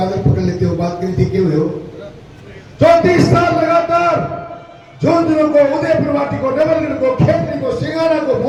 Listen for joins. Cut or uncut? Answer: uncut